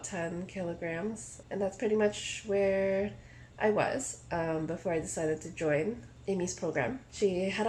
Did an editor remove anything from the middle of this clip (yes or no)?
no